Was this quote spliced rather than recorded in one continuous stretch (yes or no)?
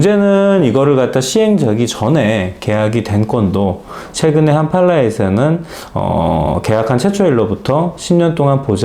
no